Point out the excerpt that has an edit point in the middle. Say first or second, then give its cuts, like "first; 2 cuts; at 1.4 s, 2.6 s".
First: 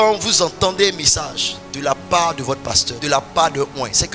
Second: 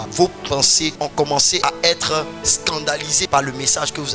second; 1 cut; at 1.5 s